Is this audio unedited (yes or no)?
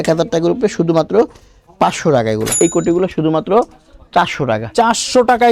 no